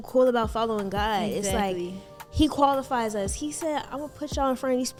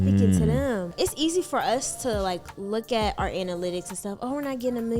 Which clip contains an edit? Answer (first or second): second